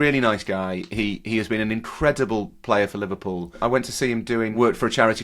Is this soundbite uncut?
no; 1 cut; at 3.6 s

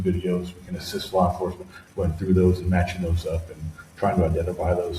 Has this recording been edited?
no; 0 cuts

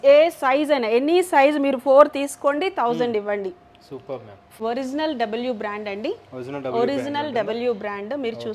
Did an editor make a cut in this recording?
yes; 1 cut; at 4.6 s

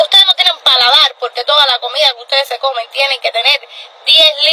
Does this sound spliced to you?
no; 0 cuts

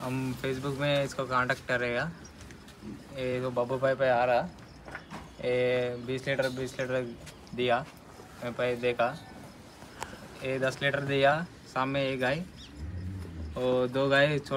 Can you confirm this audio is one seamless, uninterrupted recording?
yes; 0 cuts

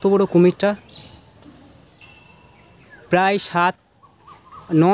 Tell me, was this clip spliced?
no; 0 cuts

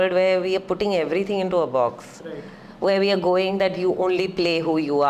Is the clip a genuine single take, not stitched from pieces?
yes; 0 cuts

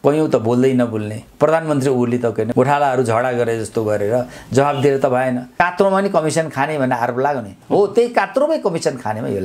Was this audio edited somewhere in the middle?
yes; 2 cuts; at 2.5 s, 5.5 s

